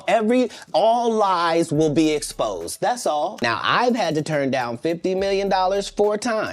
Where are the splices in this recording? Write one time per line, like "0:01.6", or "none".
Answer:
0:03.4